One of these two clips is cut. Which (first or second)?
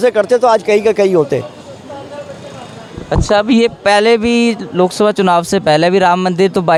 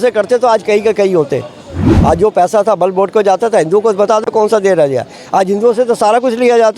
second